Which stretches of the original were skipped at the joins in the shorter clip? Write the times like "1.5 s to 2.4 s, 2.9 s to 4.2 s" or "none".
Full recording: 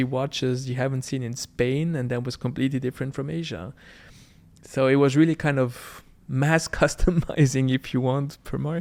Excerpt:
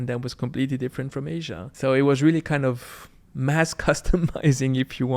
3.6 s to 4.6 s